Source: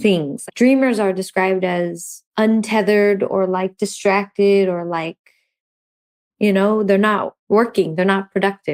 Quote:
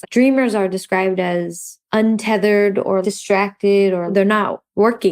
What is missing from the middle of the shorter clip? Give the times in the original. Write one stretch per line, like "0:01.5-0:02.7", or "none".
0:03.5-0:03.8
0:04.9-0:06.8